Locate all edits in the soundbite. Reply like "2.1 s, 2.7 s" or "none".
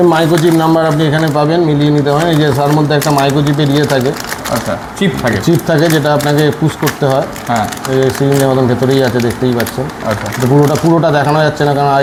none